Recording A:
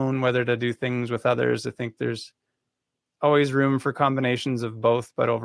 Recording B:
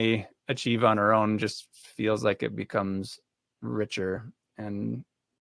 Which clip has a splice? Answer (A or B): A